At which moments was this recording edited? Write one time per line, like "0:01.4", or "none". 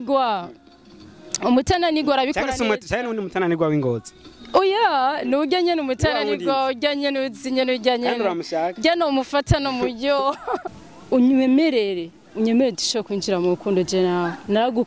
0:10.7